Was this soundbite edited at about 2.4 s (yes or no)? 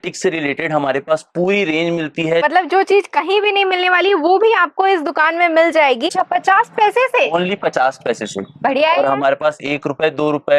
yes